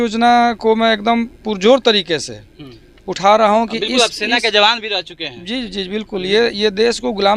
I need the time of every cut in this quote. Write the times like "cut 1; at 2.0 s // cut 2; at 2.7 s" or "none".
none